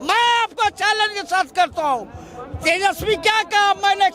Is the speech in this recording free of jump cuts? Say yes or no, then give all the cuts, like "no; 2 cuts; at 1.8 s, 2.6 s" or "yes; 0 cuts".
yes; 0 cuts